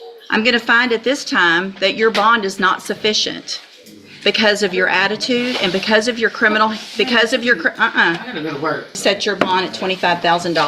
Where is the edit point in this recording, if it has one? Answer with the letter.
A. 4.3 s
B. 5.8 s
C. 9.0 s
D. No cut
C